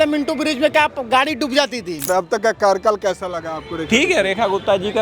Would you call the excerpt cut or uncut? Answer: cut